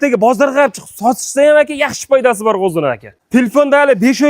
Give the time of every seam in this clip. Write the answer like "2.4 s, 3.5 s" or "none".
3.1 s